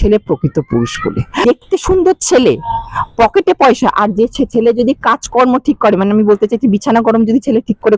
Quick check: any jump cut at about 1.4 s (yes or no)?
yes